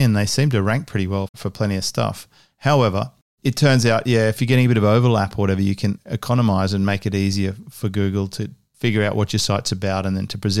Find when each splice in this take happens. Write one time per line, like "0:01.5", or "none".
0:04.4
0:06.1